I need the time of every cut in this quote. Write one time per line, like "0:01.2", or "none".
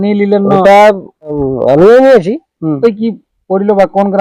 0:01.3
0:02.8